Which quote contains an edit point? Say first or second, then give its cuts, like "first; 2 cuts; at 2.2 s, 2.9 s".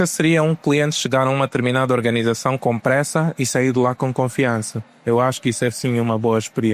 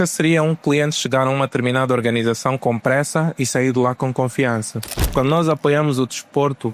second; 1 cut; at 4.9 s